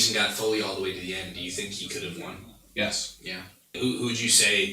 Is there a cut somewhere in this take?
yes; 1 cut; at 3.8 s

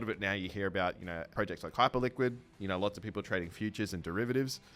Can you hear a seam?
yes; 1 cut; at 1.3 s

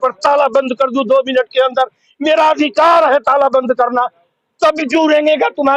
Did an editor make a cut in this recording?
no; 0 cuts

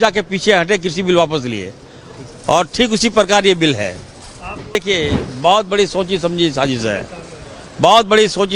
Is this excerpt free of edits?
no; 1 cut; at 4.8 s

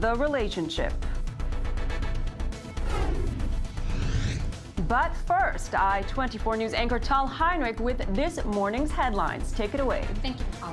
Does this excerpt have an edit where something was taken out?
yes; 1 cut; at 9.5 s

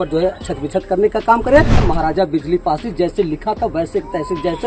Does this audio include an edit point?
yes; 1 cut; at 1.8 s

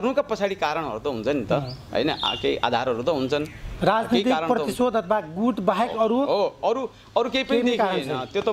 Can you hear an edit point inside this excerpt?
no; 0 cuts

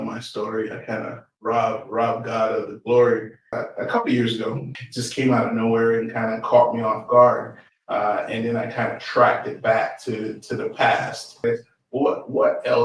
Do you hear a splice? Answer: yes; 3 cuts; at 3.5 s, 4.7 s, 11.4 s

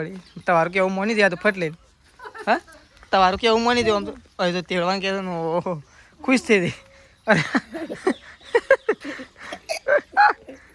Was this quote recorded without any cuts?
yes; 0 cuts

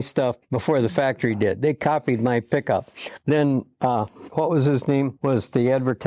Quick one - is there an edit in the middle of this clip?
yes; 2 cuts; at 4.2 s, 5.1 s

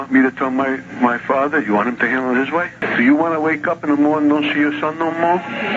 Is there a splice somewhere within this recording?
yes; 1 cut; at 2.8 s

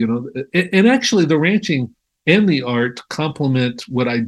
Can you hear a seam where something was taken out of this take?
no; 0 cuts

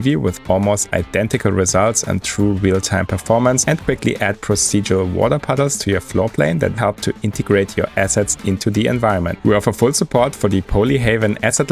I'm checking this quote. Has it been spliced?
no; 0 cuts

